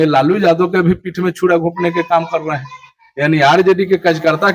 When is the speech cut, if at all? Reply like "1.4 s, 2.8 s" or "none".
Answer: none

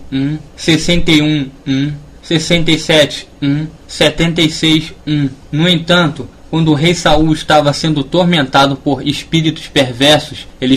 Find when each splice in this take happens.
1.4 s

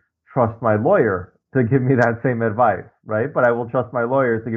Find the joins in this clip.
none

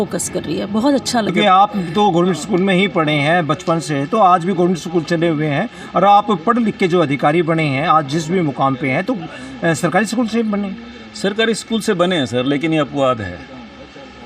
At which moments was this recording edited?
1.3 s

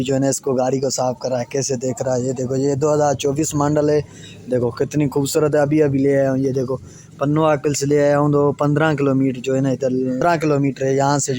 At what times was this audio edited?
none

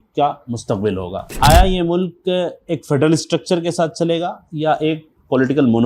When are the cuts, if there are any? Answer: 1.2 s

